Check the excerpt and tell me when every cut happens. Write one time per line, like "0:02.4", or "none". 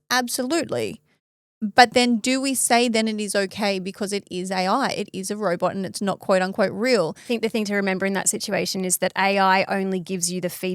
0:07.3